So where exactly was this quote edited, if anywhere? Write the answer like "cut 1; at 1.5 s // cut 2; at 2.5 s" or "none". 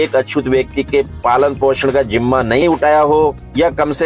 cut 1; at 2.6 s